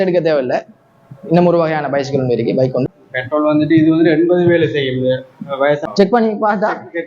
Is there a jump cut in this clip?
yes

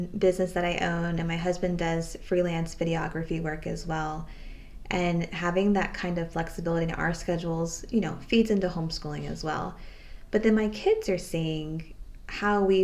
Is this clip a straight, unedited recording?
yes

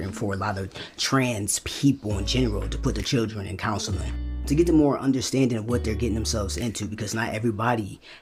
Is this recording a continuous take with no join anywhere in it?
yes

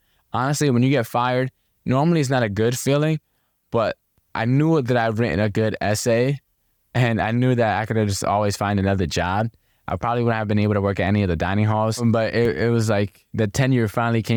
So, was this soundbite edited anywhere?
no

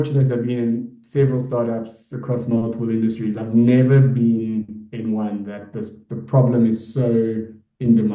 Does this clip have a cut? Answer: no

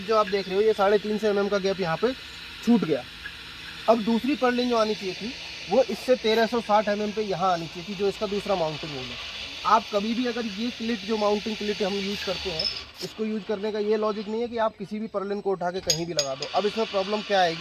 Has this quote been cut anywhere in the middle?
no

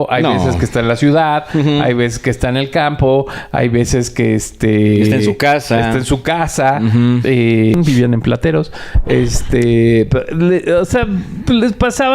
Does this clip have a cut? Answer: yes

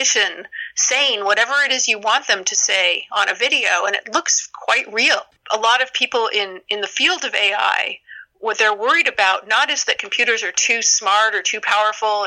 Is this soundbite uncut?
no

